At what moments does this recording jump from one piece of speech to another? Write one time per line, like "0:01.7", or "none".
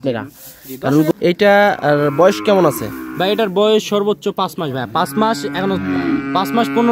0:01.1